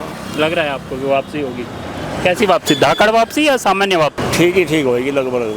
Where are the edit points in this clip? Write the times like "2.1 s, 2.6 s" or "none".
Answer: 4.2 s